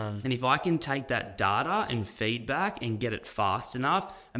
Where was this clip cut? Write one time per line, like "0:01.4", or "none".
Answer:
none